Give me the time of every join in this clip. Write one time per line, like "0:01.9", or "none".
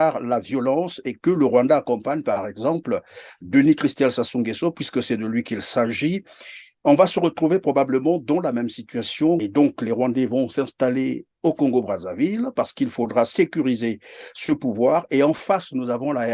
0:09.5